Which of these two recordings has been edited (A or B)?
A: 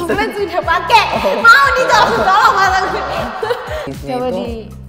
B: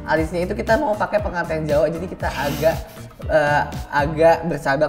A